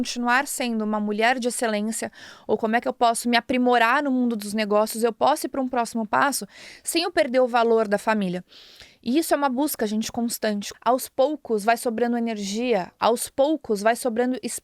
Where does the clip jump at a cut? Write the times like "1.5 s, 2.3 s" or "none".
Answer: 10.7 s